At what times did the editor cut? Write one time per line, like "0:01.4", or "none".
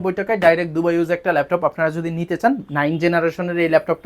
none